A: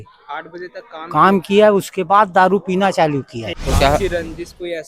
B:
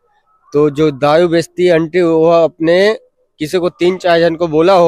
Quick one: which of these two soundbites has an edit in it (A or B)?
A